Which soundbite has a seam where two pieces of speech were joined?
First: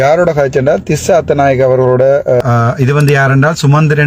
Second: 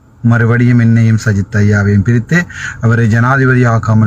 first; 1 cut; at 2.4 s

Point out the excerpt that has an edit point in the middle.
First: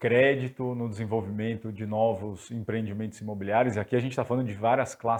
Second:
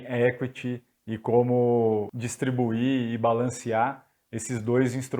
second; 1 cut; at 2.1 s

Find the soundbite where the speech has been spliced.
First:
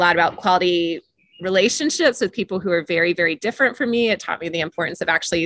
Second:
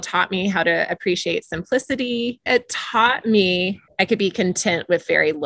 second; 2 cuts; at 2.4 s, 3.8 s

